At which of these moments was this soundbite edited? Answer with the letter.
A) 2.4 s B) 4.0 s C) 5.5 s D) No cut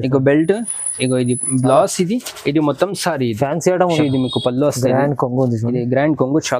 B